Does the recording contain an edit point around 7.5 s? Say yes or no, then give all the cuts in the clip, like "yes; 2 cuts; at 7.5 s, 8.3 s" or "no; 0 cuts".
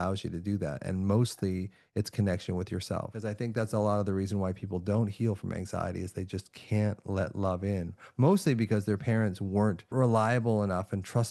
no; 2 cuts; at 3.2 s, 9.9 s